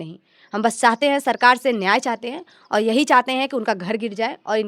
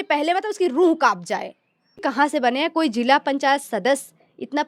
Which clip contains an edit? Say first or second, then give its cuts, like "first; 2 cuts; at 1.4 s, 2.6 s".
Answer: second; 1 cut; at 2.0 s